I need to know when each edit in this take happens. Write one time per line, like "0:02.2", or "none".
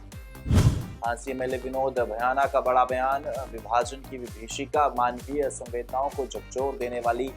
0:01.0